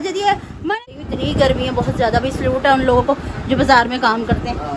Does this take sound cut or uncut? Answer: cut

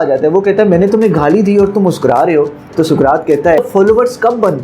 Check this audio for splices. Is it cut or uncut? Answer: cut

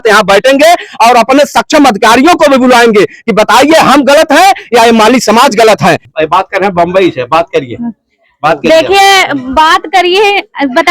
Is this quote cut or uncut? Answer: cut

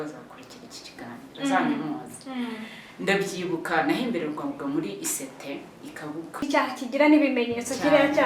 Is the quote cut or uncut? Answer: cut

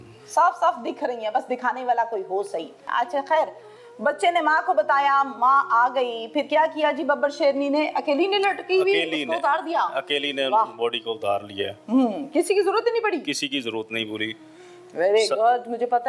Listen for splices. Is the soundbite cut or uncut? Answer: uncut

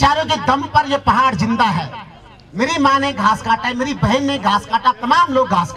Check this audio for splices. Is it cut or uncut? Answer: uncut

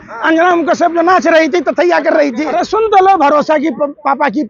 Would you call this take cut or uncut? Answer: cut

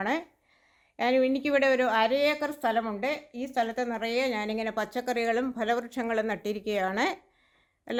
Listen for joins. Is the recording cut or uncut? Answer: uncut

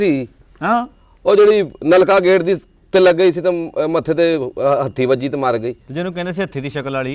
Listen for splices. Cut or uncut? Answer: uncut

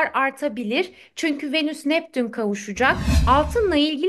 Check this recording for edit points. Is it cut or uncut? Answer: cut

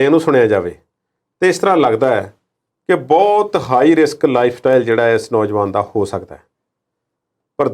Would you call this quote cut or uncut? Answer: uncut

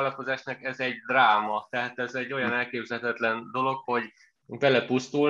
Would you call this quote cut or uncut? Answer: uncut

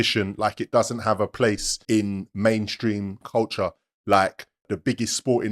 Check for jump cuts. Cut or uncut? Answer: cut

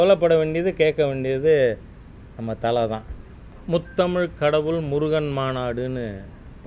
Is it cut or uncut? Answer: cut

